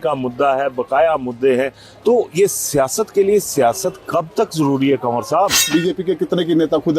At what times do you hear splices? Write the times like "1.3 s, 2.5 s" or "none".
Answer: 5.7 s